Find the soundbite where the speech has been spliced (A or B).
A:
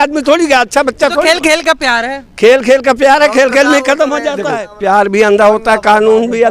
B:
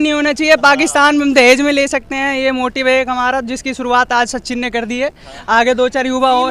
A